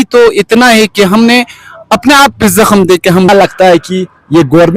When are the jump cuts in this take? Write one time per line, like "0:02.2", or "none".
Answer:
0:03.3